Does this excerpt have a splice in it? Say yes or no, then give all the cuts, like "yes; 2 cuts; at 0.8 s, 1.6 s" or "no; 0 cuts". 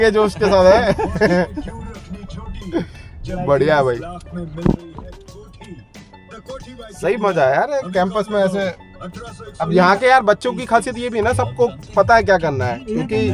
no; 0 cuts